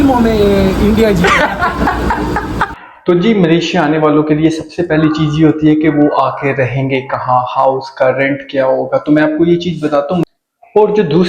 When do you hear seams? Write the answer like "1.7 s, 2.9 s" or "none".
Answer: 2.7 s, 10.2 s